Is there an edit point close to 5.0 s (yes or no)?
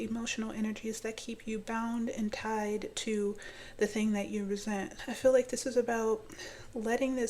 yes